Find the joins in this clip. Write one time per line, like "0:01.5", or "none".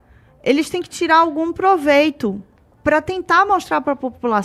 none